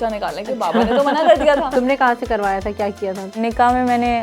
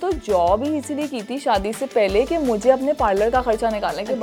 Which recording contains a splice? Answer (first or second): first